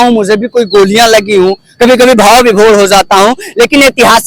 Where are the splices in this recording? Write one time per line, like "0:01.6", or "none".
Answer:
none